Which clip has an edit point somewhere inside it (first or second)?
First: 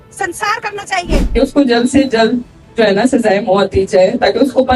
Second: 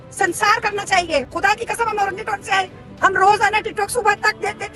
first